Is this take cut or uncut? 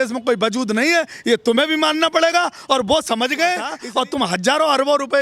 cut